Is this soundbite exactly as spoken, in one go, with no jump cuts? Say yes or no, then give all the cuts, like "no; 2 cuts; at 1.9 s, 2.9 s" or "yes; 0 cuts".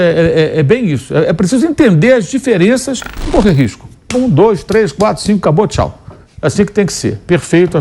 no; 1 cut; at 3.3 s